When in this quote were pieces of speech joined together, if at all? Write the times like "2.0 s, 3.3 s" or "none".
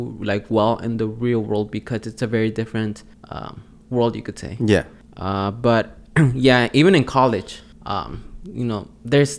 none